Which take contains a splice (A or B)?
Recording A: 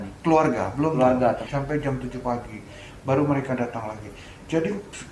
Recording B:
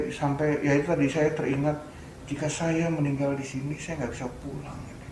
A